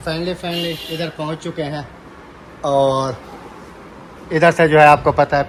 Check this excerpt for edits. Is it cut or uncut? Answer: uncut